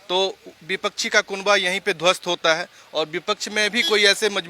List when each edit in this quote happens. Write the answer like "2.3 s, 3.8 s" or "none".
none